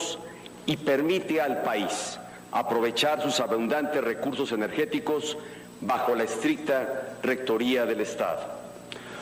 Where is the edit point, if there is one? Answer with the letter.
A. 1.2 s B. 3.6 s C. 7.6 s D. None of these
B